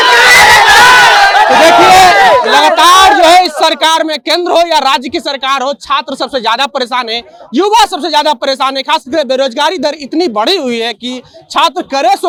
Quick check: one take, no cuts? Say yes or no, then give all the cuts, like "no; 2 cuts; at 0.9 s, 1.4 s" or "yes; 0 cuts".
yes; 0 cuts